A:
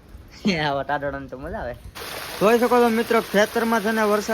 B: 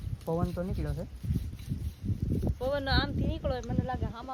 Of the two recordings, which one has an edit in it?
A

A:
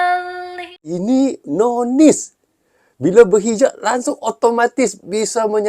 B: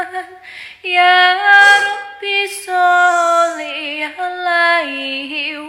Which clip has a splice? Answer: A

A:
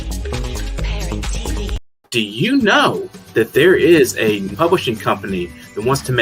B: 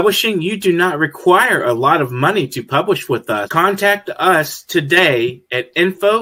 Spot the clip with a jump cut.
A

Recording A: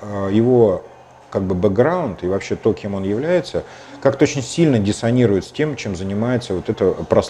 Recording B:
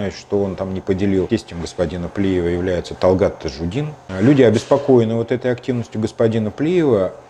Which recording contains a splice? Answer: B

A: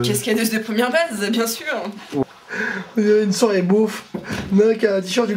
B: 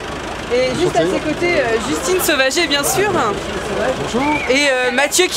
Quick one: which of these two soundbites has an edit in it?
A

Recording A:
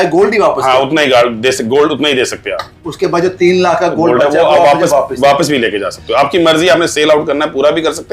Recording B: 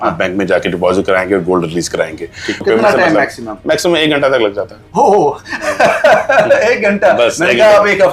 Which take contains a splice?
B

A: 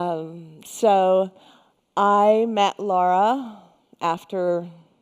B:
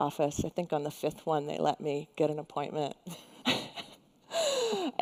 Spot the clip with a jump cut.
A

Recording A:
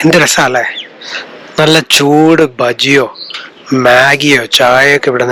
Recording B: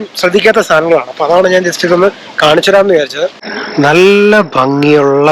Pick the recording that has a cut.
B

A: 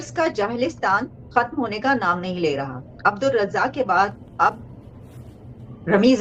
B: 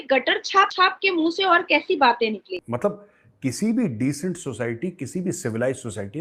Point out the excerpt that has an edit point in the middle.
B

